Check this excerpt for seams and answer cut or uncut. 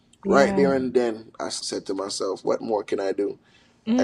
cut